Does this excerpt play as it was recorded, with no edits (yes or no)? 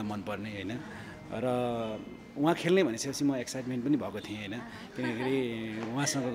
yes